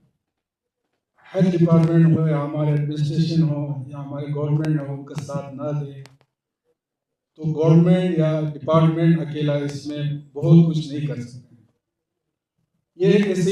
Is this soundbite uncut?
yes; 0 cuts

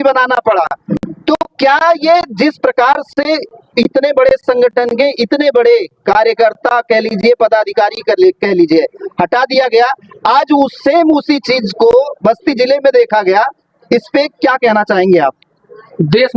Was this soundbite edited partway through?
no; 0 cuts

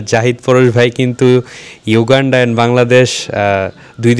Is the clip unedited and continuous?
yes; 0 cuts

